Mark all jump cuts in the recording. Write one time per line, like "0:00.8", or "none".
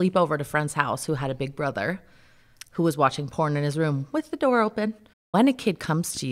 0:05.2